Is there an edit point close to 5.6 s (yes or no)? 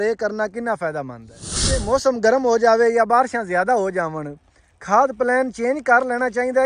no